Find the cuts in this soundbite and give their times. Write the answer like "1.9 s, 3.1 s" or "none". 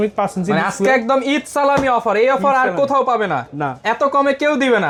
none